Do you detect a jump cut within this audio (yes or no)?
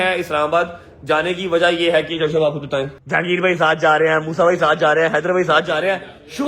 yes